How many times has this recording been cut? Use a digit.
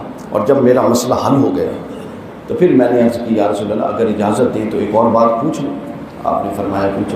0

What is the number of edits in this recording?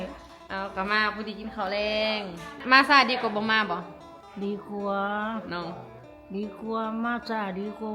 1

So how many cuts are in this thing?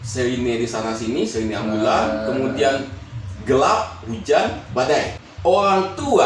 1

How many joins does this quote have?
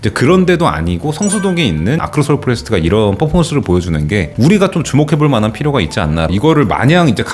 2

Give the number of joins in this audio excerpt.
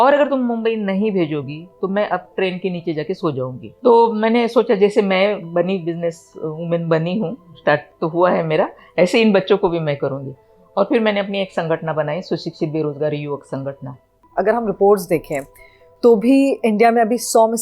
2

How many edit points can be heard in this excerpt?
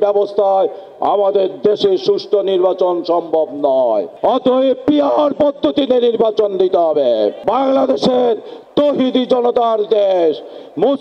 1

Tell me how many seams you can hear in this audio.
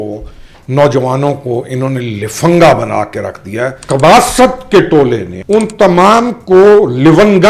2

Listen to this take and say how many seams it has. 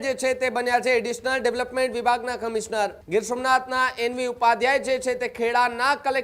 1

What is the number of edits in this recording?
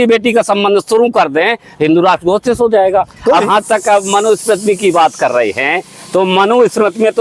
1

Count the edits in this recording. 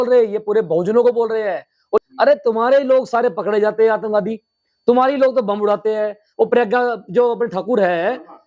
1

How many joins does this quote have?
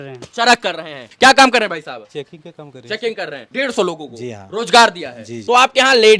3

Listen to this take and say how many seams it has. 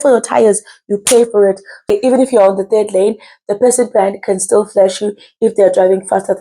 1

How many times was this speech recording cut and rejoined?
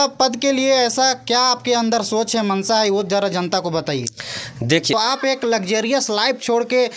1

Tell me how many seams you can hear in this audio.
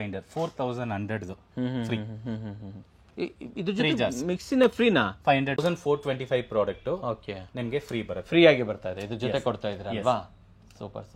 1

